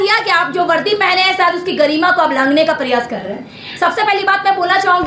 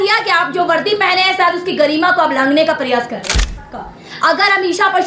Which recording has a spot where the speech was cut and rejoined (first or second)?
second